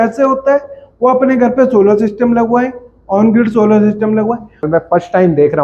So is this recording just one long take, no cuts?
no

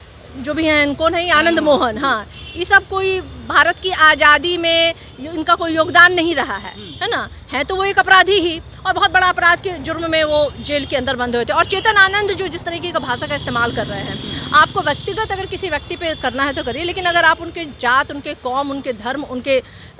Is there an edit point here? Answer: no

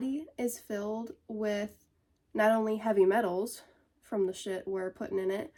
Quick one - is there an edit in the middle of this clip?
no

